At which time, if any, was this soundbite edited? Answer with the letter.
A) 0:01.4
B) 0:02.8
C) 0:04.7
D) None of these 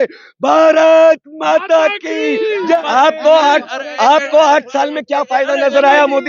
B